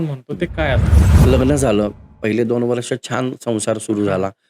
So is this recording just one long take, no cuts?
no; 1 cut; at 0.9 s

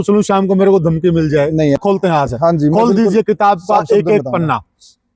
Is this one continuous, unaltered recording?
no; 1 cut; at 1.8 s

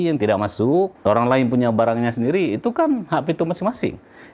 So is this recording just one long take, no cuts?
no; 1 cut; at 0.9 s

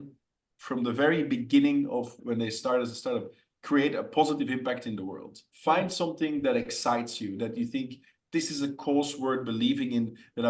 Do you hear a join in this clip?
yes; 2 cuts; at 2.2 s, 5.4 s

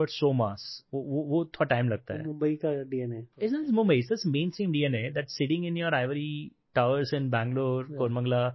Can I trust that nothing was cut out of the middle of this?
no; 1 cut; at 3.2 s

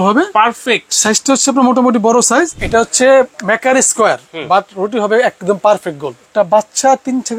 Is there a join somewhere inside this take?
yes; 2 cuts; at 2.6 s, 6.2 s

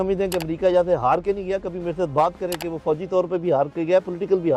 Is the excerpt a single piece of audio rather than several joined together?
yes; 0 cuts

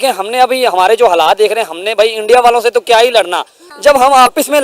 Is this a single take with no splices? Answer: no; 1 cut; at 3.6 s

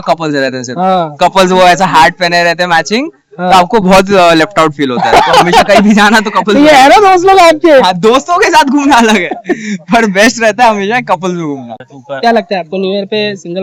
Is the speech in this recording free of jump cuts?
no; 1 cut; at 11.8 s

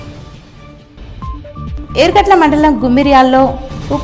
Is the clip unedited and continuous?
yes; 0 cuts

